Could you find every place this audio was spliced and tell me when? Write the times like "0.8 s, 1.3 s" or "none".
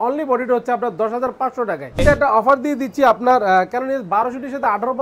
2.0 s